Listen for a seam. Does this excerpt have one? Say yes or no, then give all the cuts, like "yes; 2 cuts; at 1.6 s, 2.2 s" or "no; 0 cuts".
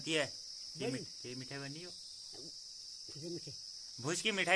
no; 0 cuts